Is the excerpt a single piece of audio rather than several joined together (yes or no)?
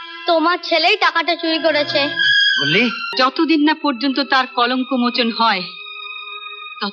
no